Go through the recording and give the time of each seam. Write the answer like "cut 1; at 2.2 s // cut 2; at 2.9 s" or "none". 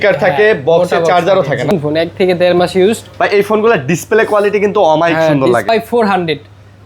cut 1; at 1.7 s // cut 2; at 5.7 s